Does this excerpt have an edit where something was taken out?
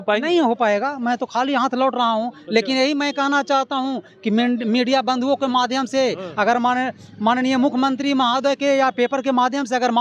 no; 0 cuts

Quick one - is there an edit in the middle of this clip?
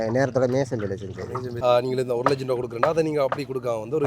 yes; 1 cut; at 1.4 s

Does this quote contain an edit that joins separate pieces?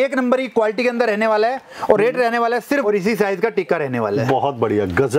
yes; 1 cut; at 2.9 s

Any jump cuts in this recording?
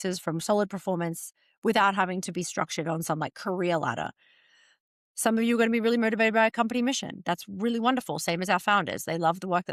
no; 0 cuts

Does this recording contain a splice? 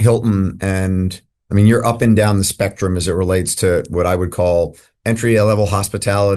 no; 0 cuts

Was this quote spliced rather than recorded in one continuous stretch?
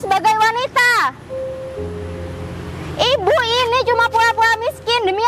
no; 0 cuts

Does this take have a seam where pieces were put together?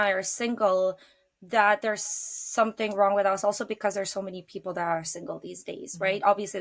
no; 0 cuts

